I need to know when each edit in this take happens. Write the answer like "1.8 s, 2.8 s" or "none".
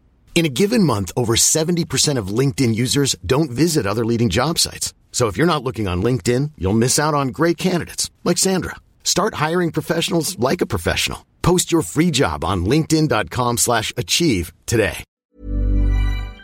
15.1 s

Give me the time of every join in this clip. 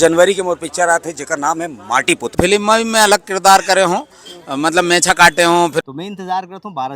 2.3 s, 5.8 s

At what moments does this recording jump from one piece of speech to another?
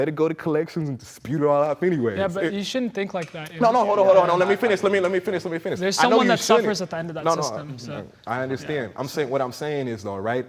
none

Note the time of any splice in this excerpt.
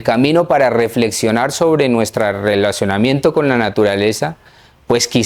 none

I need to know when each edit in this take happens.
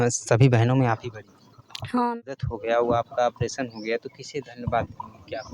2.0 s

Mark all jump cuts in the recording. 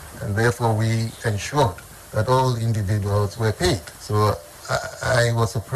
3.9 s, 4.5 s

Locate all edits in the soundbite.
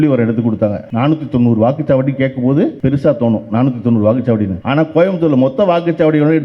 0.8 s, 2.8 s, 4.6 s

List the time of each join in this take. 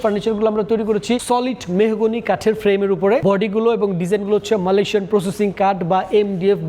1.2 s, 3.2 s

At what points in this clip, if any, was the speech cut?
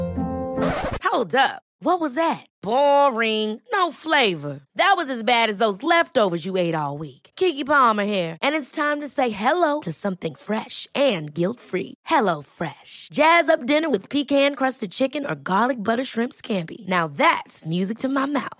none

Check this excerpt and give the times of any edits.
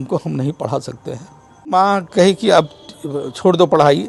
1.7 s

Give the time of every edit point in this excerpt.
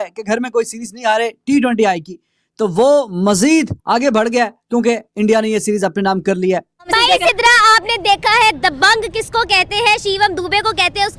6.9 s

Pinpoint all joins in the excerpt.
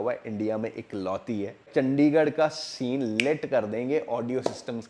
1.7 s

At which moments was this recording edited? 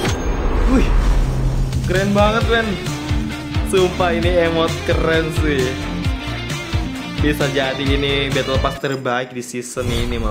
none

